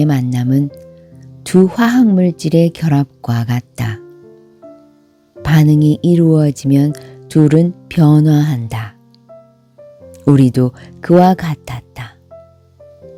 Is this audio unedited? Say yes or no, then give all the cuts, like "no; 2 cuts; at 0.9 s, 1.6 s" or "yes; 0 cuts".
yes; 0 cuts